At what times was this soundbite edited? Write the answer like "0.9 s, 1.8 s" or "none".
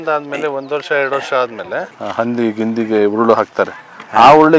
1.9 s

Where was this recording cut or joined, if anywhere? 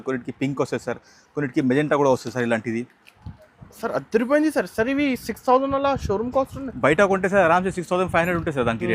none

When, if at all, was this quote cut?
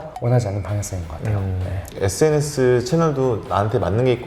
1.9 s

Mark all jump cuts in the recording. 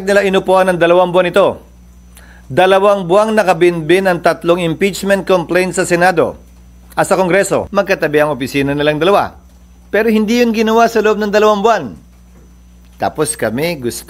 7.7 s

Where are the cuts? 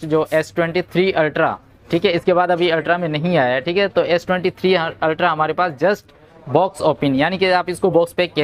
none

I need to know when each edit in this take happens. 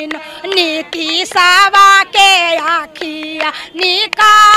none

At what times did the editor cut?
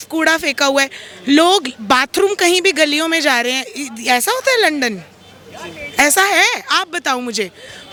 none

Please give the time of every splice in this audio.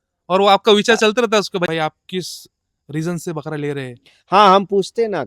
1.7 s

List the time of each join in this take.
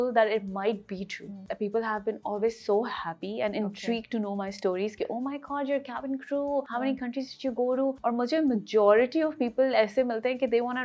1.4 s, 6.7 s, 8.0 s

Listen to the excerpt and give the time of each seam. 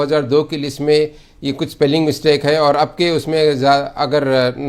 none

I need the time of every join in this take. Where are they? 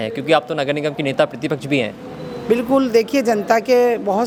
none

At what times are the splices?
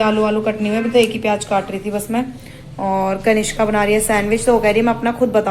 none

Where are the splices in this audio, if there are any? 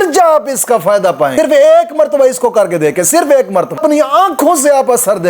1.3 s, 3.8 s

